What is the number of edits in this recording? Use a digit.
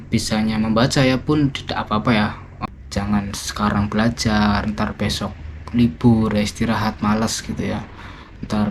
1